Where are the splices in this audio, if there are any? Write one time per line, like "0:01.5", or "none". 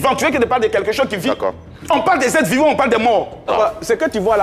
0:03.5

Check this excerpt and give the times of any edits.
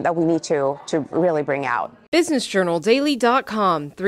0:01.9

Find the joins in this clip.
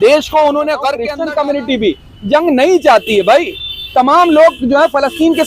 0:01.0

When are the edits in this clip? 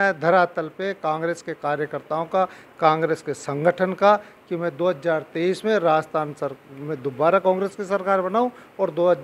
none

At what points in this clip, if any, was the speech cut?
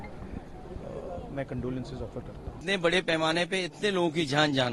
0:02.6

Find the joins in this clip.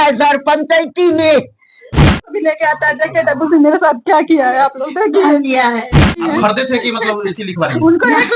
0:02.1
0:06.2

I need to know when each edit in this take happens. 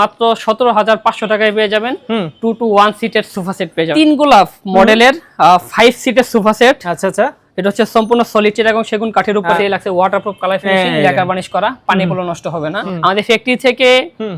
0:03.9
0:09.6
0:12.8

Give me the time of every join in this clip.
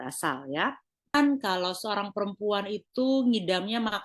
0:01.1

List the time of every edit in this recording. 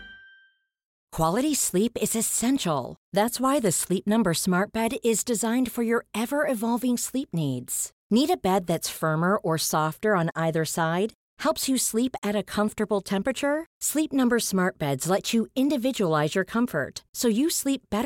0:01.0

